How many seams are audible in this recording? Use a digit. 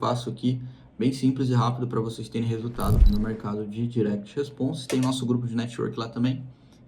1